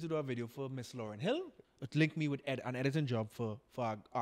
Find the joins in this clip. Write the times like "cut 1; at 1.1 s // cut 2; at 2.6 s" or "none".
cut 1; at 1.6 s